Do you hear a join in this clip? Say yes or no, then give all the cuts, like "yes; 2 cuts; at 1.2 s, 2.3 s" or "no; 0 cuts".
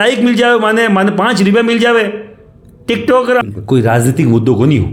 yes; 1 cut; at 3.4 s